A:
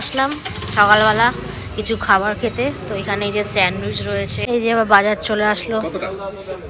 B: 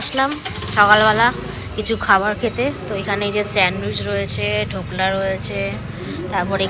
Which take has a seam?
A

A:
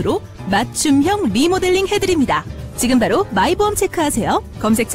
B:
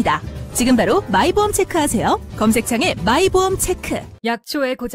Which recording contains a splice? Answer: B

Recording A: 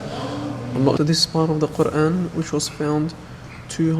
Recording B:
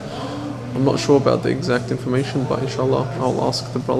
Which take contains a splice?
A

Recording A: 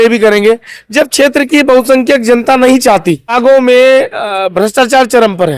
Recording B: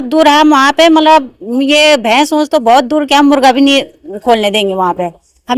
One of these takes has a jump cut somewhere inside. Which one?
A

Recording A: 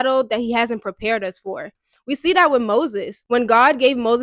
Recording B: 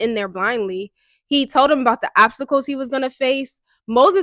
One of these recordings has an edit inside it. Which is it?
A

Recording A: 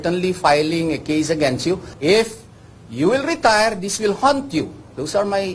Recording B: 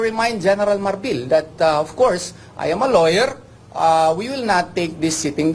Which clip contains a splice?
A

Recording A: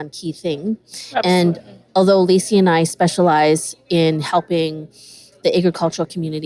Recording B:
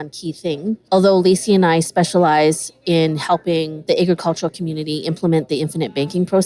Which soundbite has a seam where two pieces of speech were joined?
B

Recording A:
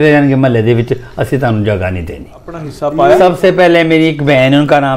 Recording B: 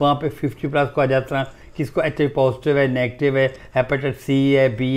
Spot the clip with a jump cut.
A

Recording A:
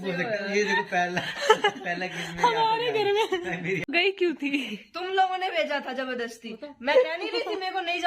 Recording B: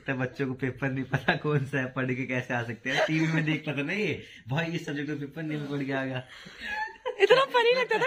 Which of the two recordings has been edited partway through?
A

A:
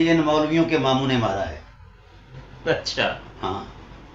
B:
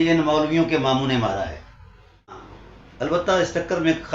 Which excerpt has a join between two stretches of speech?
B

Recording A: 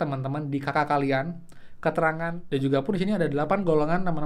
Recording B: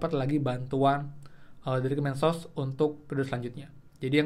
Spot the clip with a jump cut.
A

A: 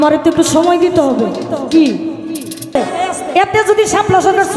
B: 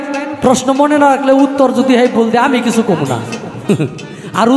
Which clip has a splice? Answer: A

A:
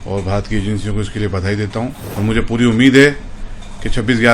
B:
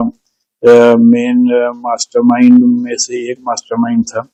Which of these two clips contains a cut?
A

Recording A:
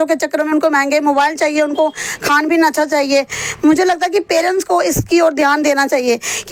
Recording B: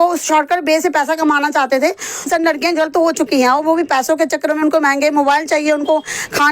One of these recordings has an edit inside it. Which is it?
B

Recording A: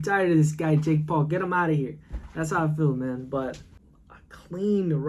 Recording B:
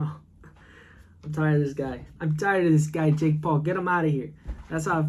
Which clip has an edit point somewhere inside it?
A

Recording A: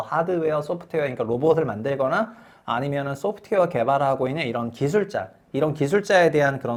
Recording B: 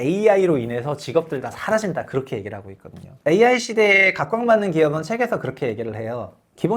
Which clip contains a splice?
B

